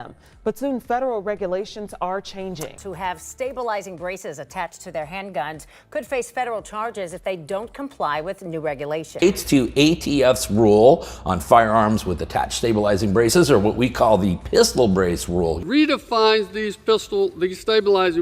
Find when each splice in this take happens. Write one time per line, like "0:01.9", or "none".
0:02.6
0:09.1
0:15.6